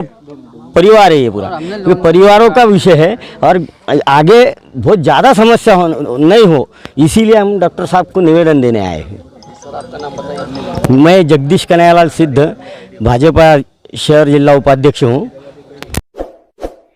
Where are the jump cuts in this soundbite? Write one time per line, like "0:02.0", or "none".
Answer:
none